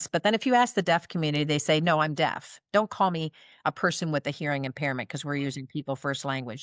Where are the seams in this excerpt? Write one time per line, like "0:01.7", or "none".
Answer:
none